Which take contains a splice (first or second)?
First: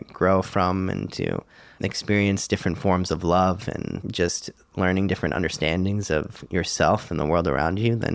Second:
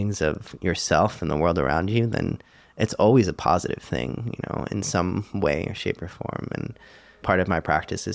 second